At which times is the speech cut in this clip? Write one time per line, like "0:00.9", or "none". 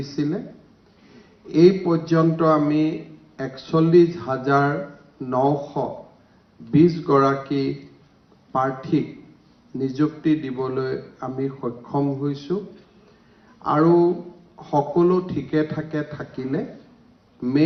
none